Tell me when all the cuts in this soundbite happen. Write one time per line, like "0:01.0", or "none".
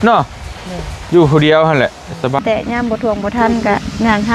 0:02.4